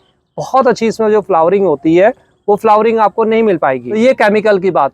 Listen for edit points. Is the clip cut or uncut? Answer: cut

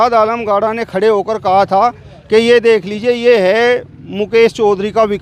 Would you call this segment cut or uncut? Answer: uncut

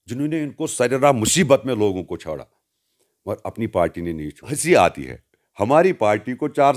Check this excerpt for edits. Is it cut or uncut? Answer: cut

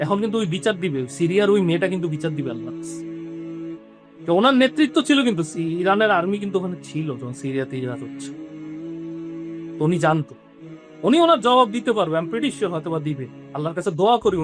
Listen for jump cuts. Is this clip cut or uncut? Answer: cut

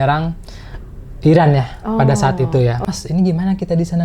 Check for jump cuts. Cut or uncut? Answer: cut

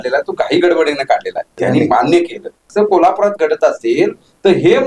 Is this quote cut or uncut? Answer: cut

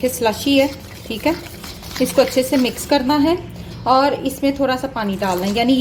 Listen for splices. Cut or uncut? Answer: uncut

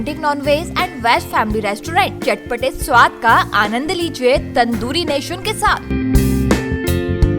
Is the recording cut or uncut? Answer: uncut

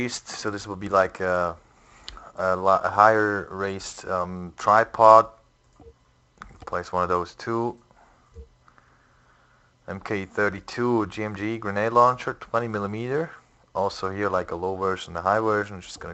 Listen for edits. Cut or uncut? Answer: uncut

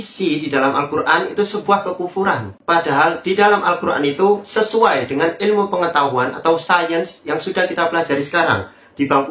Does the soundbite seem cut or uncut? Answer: uncut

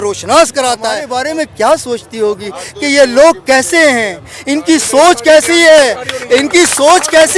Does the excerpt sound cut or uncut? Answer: cut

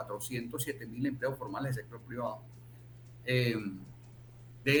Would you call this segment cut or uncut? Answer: uncut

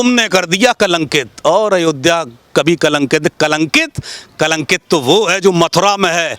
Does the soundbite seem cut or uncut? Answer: uncut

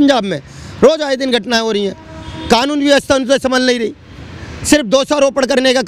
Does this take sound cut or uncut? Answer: uncut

